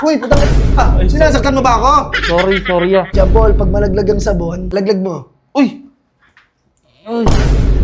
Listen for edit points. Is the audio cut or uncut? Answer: cut